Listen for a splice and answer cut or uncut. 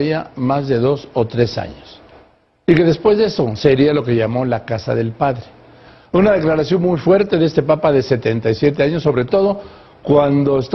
cut